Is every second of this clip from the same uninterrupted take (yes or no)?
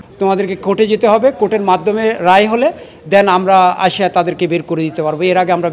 yes